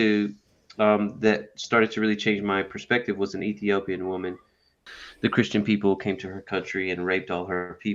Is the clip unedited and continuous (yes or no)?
no